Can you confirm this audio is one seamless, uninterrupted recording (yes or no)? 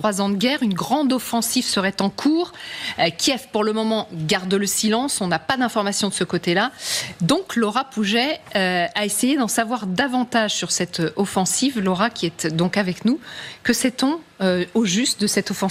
yes